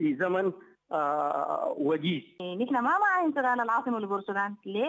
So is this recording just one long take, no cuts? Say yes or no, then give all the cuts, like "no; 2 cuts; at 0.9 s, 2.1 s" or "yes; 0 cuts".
no; 1 cut; at 2.4 s